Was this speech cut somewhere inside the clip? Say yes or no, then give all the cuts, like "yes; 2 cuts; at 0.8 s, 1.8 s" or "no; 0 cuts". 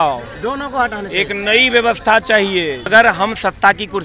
yes; 1 cut; at 2.9 s